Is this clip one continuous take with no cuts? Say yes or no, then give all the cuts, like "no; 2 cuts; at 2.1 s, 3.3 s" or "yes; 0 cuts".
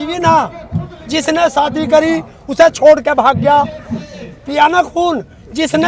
yes; 0 cuts